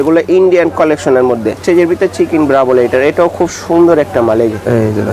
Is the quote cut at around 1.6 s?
yes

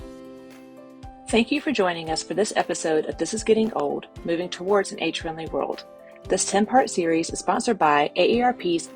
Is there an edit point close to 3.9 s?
no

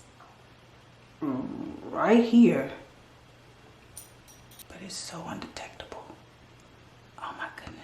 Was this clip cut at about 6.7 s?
no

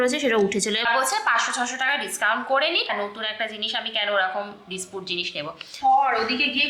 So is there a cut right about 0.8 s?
yes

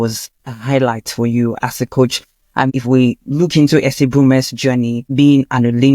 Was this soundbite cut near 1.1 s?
no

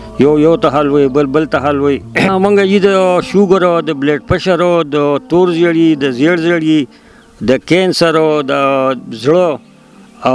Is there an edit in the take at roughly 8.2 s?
no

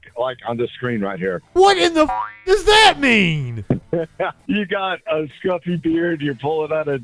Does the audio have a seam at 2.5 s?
no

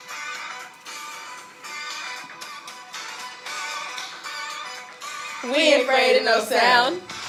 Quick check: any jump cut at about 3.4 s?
no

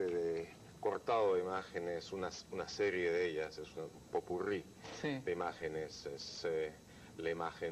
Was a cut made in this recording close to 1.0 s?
yes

